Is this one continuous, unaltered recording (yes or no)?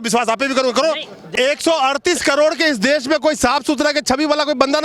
no